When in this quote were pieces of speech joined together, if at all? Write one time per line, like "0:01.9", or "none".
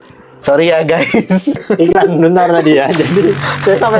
0:01.6